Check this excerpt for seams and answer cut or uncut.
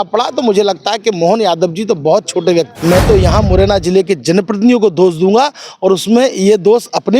cut